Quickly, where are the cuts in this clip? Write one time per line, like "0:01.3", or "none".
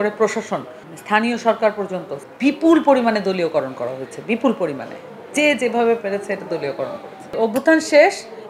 0:02.2
0:07.3